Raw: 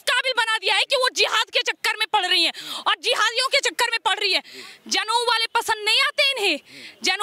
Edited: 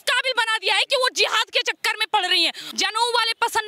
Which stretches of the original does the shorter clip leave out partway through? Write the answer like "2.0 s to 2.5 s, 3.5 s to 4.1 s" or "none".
2.6 s to 4.8 s